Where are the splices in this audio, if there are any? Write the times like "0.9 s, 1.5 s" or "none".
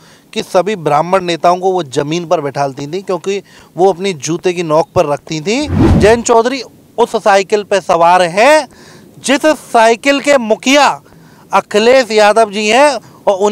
5.8 s